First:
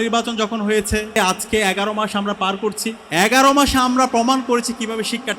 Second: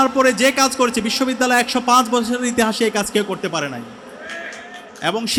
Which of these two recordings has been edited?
first; 2 cuts; at 1.2 s, 3.0 s

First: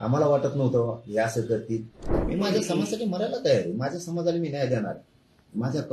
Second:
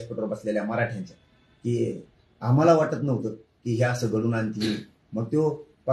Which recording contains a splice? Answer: first; 1 cut; at 2.0 s

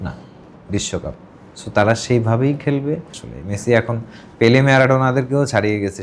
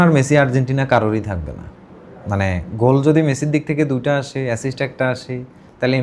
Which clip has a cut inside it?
first; 1 cut; at 3.1 s

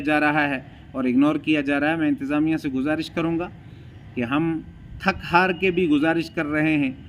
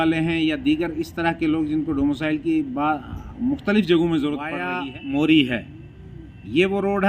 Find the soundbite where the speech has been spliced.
second; 1 cut; at 4.7 s

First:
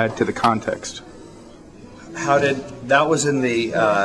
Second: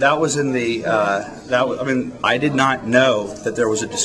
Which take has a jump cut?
second; 1 cut; at 2.1 s

